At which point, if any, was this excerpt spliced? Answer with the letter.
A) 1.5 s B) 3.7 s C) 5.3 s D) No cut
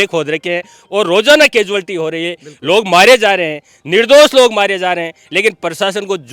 D